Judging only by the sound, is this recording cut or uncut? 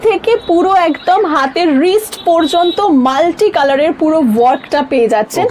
uncut